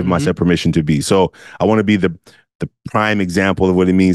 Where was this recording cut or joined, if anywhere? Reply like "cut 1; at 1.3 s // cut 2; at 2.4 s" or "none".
none